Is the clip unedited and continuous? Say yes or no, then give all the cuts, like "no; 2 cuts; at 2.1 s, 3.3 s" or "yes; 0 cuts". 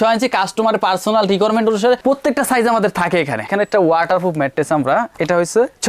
no; 1 cut; at 3.5 s